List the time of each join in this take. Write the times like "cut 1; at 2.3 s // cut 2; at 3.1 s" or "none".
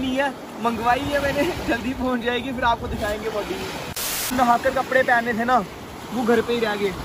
cut 1; at 4.3 s